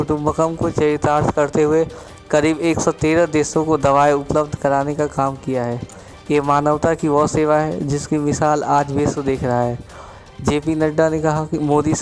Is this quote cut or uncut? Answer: uncut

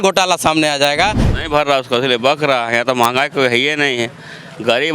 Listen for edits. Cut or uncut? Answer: cut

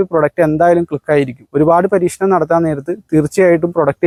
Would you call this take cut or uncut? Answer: uncut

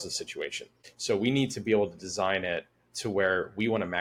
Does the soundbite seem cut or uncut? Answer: uncut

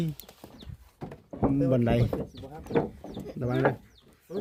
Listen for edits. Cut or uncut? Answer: uncut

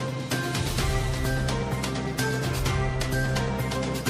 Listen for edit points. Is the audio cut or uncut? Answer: cut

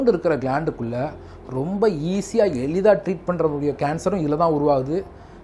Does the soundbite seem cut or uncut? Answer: uncut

